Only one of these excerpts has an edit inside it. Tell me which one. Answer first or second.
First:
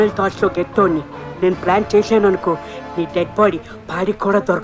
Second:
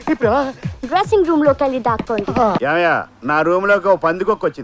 second